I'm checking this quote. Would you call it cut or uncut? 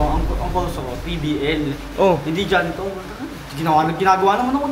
uncut